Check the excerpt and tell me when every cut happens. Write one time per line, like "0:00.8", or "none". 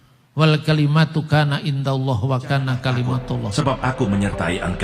0:03.5

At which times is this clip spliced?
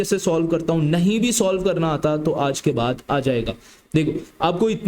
none

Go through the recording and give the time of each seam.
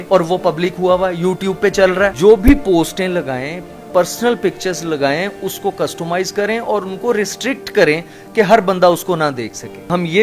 none

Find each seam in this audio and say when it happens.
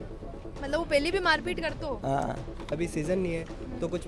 0:02.7

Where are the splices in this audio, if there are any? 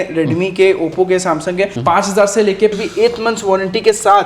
0:01.8
0:02.7

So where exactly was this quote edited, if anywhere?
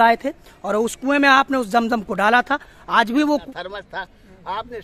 0:03.4

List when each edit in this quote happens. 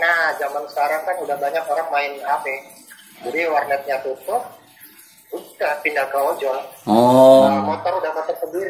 0:07.5

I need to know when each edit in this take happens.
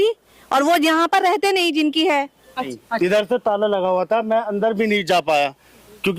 0:02.7

